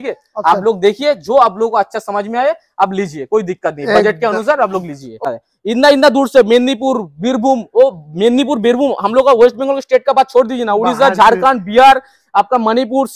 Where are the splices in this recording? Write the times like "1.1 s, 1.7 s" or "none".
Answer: 5.2 s